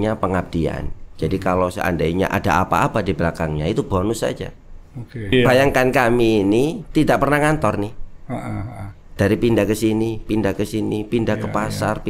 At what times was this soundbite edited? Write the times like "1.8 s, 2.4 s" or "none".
5.3 s

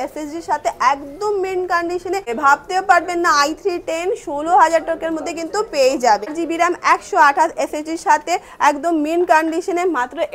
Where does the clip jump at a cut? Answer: 2.3 s, 6.3 s

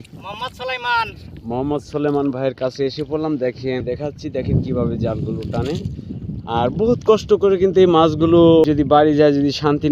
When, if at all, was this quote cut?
3.8 s, 8.6 s

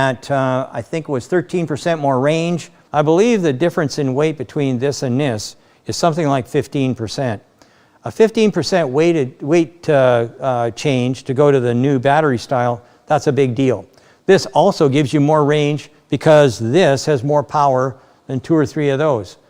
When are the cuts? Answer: 2.7 s

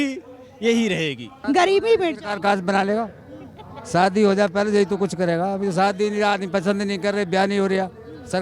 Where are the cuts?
1.4 s

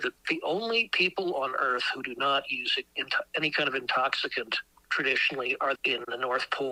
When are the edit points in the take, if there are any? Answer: none

